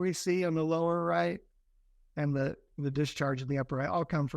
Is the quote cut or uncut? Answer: uncut